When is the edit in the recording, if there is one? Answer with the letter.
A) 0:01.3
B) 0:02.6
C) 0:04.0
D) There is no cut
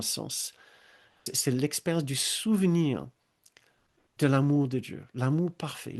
A